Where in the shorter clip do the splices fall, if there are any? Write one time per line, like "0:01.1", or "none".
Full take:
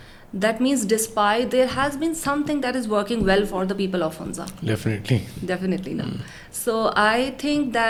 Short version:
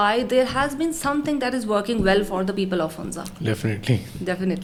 none